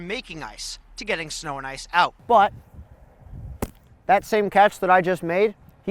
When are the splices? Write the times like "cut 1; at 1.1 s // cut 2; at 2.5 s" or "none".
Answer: cut 1; at 2.2 s